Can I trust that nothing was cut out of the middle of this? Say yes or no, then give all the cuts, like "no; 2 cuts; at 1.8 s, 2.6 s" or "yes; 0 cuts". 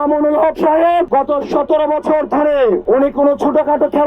no; 2 cuts; at 1.1 s, 2.8 s